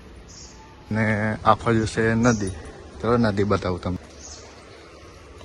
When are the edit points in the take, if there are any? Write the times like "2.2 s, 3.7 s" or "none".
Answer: 0.9 s, 4.0 s